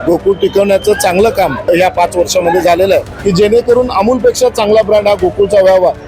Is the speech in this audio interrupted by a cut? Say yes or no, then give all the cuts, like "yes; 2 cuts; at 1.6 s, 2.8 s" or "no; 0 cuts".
yes; 1 cut; at 3.1 s